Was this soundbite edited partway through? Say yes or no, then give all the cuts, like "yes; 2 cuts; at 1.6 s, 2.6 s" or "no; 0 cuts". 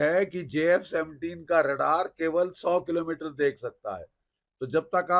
no; 0 cuts